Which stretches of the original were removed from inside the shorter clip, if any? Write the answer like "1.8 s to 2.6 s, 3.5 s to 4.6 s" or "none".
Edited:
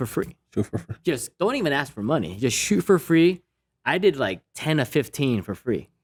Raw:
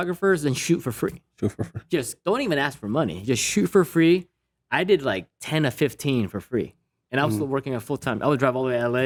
none